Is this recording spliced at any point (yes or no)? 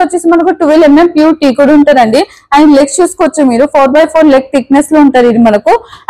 no